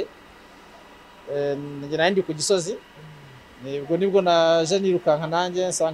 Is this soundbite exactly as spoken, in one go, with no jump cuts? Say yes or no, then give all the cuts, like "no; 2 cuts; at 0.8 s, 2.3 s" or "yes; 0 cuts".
yes; 0 cuts